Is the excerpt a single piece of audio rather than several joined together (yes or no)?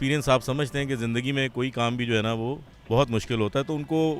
yes